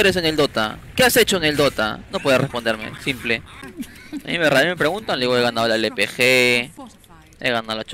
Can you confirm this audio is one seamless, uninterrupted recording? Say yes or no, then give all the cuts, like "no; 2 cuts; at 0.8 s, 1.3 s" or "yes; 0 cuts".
yes; 0 cuts